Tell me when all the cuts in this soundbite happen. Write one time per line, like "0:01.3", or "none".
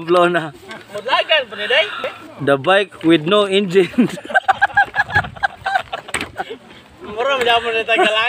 0:02.1